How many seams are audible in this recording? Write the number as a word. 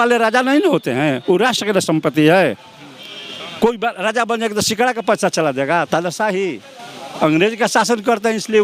zero